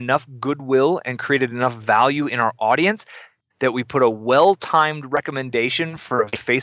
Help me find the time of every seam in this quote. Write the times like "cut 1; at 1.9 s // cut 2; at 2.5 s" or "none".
cut 1; at 5.2 s